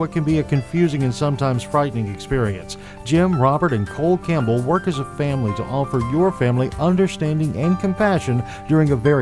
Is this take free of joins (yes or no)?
yes